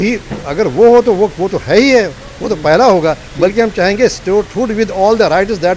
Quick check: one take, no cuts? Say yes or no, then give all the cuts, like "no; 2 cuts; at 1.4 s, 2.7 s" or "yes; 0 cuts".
yes; 0 cuts